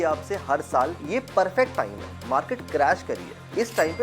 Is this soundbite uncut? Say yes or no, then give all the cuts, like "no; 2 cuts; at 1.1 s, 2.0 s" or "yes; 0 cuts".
no; 1 cut; at 1.0 s